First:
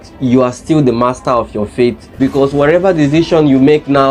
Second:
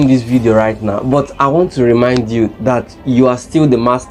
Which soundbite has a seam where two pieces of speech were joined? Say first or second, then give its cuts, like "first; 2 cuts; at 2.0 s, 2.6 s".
first; 1 cut; at 2.2 s